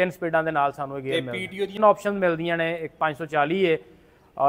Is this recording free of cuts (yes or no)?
no